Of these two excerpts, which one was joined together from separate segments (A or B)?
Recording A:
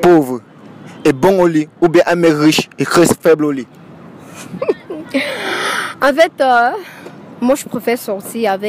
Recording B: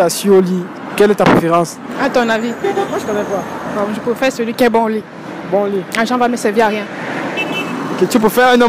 B